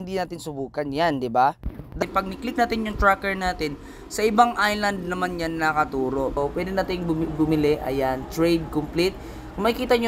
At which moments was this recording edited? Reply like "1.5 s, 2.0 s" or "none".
2.0 s, 6.4 s